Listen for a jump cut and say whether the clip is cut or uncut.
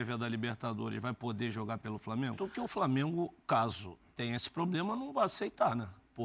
cut